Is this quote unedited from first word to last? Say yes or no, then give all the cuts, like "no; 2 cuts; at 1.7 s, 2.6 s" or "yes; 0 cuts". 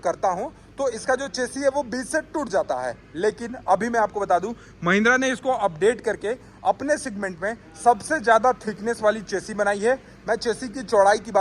yes; 0 cuts